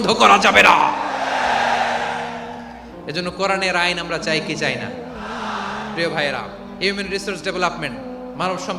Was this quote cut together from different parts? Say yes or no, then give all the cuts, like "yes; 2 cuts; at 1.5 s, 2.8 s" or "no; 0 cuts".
no; 0 cuts